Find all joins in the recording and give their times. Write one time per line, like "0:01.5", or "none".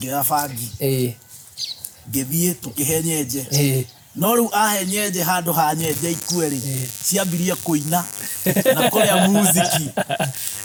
none